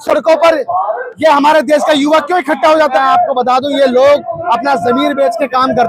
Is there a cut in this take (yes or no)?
yes